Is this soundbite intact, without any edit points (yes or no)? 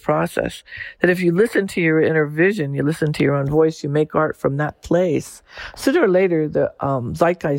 yes